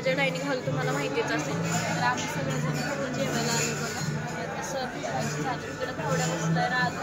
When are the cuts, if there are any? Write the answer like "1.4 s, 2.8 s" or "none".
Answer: none